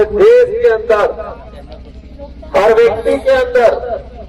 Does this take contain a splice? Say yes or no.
no